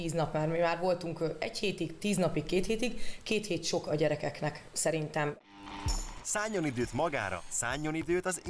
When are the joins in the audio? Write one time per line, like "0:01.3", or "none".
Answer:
0:05.3